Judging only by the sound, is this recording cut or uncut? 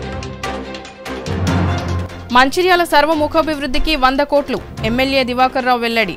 cut